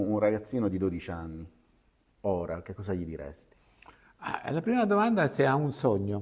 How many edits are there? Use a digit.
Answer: 0